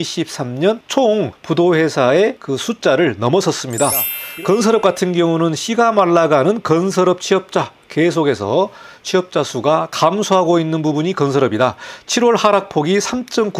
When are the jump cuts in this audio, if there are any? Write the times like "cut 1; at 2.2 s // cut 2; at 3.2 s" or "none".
cut 1; at 1.1 s // cut 2; at 2.5 s // cut 3; at 4.2 s